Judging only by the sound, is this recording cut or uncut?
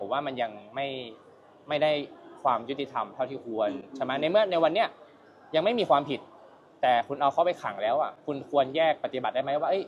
uncut